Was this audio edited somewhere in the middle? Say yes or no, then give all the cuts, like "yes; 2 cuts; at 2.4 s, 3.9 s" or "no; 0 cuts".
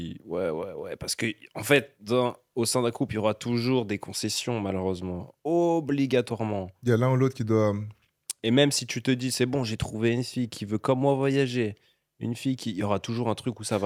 no; 0 cuts